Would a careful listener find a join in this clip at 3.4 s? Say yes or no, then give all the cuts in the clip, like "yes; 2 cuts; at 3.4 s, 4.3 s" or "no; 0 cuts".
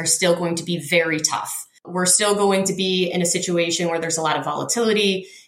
no; 1 cut; at 1.9 s